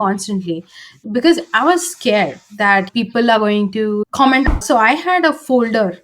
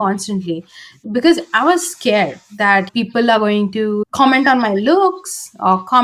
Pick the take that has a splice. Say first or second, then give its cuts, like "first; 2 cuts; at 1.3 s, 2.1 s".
first; 1 cut; at 4.5 s